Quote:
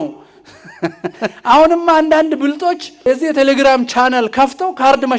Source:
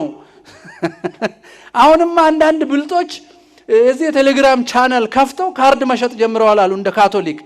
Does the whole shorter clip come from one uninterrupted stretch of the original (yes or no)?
no